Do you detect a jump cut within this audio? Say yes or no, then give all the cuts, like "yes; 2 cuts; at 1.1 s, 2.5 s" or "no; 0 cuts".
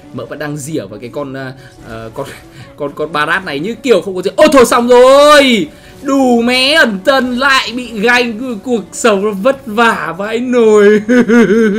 no; 0 cuts